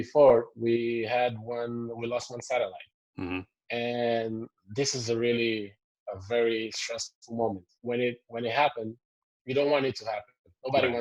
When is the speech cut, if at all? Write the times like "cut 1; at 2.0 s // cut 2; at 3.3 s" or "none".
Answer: cut 1; at 7.7 s